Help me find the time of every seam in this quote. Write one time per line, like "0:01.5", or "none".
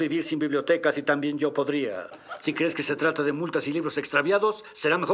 0:02.1